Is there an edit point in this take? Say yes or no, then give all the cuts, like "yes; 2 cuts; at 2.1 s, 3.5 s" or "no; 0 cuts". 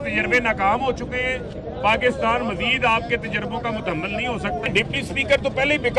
yes; 1 cut; at 4.7 s